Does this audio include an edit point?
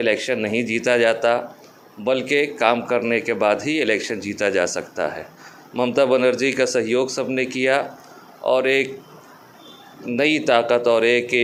no; 0 cuts

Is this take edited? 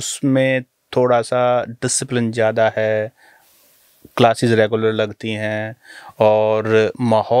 no; 0 cuts

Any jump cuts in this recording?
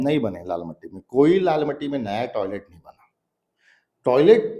no; 0 cuts

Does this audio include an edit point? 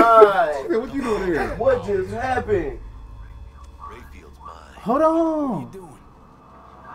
no; 0 cuts

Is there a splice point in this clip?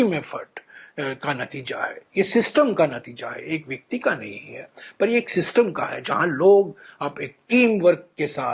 no; 0 cuts

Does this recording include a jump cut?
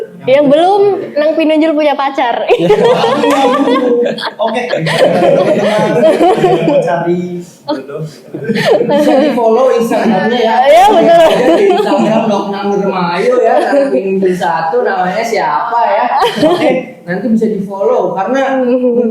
no; 0 cuts

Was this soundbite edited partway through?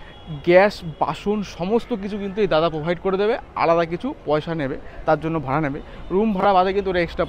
no; 0 cuts

